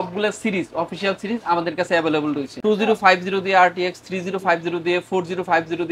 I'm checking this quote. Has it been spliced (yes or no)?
no